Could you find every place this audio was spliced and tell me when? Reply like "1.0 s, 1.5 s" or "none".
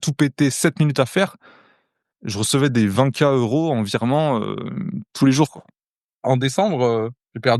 6.2 s